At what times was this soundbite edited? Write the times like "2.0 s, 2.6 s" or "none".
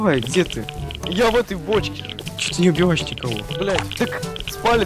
2.5 s, 4.0 s